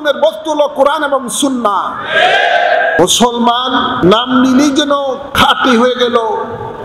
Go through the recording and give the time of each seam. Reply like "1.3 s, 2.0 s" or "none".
3.0 s, 4.0 s, 5.3 s